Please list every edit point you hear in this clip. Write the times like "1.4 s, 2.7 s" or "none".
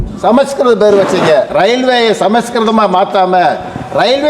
1.5 s